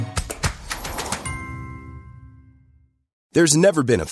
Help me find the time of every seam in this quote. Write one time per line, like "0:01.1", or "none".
0:03.1